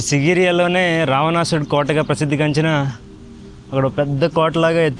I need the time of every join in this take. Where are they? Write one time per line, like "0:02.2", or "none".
none